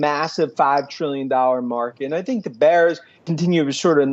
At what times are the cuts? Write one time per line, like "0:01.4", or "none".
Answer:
0:03.1